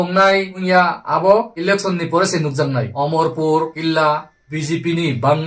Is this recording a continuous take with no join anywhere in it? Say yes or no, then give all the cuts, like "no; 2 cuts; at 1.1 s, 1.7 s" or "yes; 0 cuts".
yes; 0 cuts